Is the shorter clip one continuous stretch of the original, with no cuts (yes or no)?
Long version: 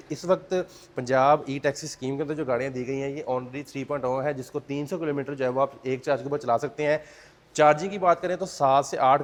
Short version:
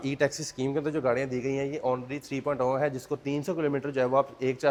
yes